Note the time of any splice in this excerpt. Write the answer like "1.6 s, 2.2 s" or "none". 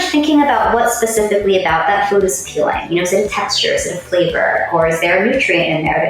none